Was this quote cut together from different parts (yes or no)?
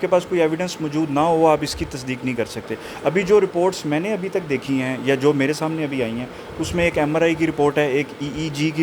no